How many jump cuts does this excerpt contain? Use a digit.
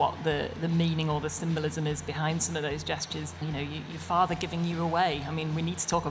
1